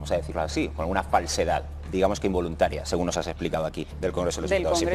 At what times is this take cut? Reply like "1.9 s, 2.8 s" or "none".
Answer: 3.9 s